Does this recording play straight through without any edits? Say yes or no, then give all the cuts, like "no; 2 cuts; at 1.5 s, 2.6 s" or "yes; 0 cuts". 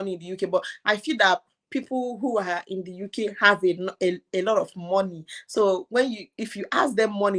yes; 0 cuts